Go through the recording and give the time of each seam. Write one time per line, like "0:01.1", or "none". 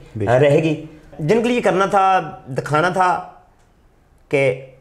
0:01.1